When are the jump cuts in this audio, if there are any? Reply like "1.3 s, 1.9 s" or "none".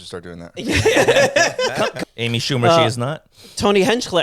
2.0 s